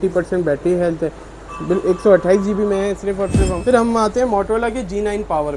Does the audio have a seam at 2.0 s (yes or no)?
no